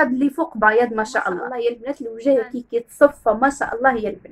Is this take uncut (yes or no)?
no